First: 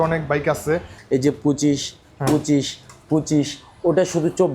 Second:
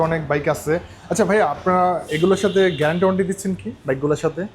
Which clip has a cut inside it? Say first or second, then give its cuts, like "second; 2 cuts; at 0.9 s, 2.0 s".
first; 1 cut; at 0.9 s